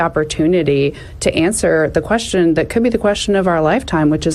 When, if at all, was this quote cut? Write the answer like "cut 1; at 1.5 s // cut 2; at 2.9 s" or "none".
none